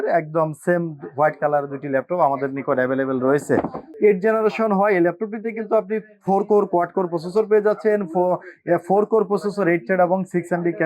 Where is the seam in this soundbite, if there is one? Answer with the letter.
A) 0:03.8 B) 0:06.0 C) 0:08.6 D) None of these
A